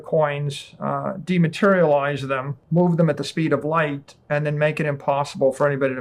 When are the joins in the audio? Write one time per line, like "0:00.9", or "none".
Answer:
0:02.5

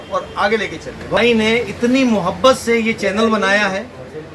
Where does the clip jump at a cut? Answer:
0:01.2

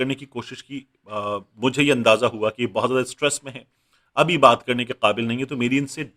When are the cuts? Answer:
none

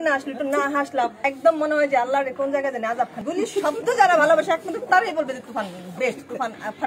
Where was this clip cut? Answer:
0:01.2
0:03.2

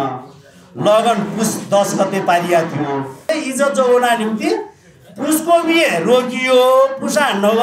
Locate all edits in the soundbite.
0:03.3

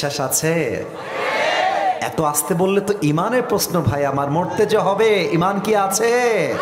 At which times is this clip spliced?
none

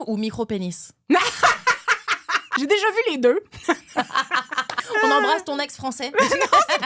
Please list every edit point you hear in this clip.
0:02.4
0:04.8

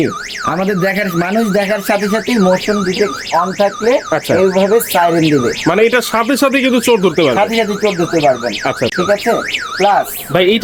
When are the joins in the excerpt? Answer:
none

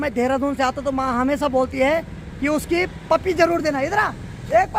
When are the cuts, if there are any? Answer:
none

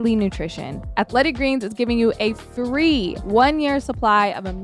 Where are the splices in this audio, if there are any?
0:00.9
0:03.2

